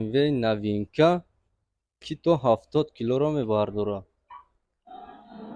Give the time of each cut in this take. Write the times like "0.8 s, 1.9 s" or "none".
none